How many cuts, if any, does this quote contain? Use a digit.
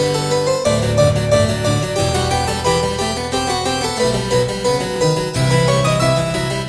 0